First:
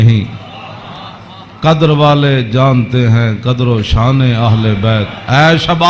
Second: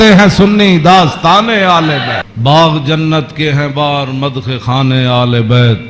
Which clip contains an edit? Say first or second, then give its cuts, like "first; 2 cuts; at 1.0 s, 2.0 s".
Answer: second; 1 cut; at 2.3 s